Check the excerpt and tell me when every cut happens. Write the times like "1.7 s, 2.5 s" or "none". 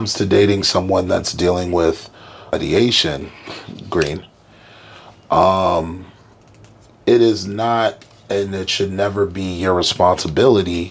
2.5 s